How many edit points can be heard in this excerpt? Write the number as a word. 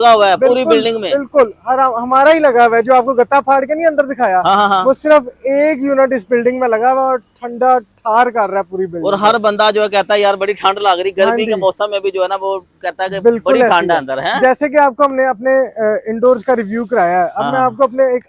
zero